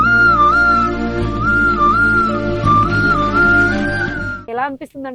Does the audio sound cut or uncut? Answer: cut